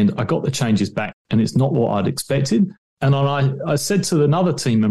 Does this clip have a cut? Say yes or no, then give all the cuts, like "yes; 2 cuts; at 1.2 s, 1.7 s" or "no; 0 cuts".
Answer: yes; 1 cut; at 1.1 s